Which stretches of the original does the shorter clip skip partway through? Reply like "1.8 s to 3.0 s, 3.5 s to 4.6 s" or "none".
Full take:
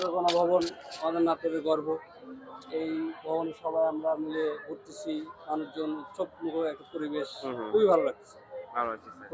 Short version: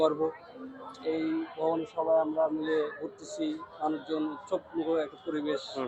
none